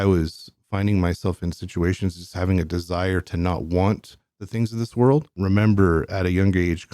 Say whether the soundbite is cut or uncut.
cut